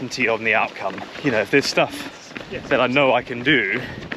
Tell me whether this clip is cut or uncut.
cut